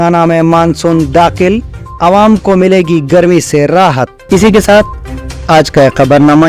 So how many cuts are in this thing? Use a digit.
0